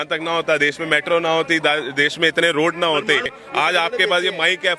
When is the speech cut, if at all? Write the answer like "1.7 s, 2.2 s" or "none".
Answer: none